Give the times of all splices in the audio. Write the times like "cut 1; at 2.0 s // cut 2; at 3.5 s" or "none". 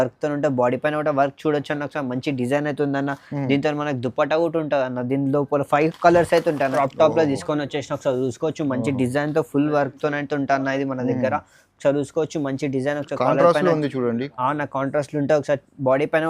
cut 1; at 6.7 s